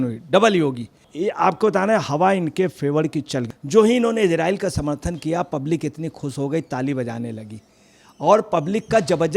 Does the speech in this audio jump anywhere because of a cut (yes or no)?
yes